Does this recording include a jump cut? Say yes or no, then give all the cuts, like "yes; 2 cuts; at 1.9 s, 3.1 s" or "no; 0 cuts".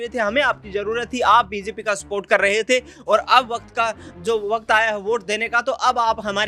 no; 0 cuts